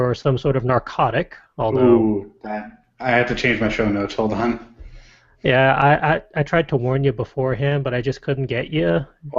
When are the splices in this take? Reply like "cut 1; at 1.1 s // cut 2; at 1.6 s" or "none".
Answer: cut 1; at 5.9 s